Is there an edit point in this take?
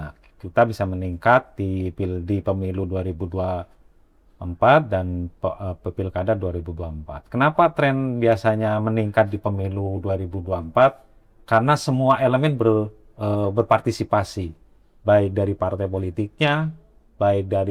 no; 0 cuts

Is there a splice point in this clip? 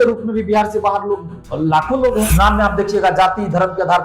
yes; 1 cut; at 2.3 s

